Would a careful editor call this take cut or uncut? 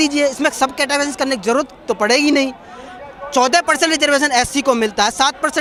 uncut